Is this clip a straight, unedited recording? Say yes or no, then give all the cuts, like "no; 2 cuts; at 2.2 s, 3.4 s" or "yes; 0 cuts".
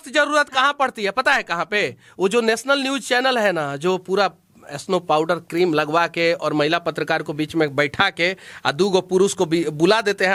yes; 0 cuts